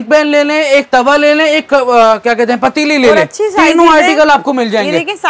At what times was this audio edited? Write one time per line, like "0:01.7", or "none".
none